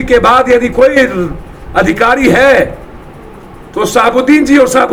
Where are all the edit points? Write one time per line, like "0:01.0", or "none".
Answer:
none